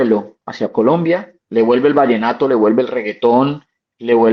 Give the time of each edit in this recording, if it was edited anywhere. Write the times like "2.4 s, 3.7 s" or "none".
1.4 s